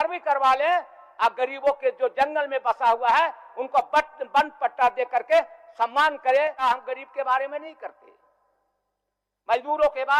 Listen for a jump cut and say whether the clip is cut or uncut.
cut